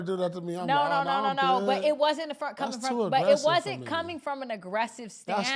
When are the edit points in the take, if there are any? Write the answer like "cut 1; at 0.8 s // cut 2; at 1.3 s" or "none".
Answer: none